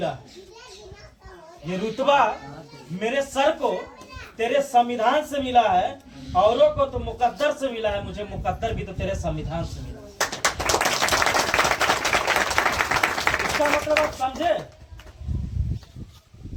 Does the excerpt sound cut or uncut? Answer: uncut